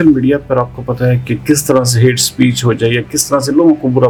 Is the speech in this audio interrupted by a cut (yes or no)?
no